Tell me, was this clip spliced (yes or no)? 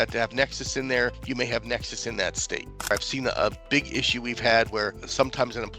yes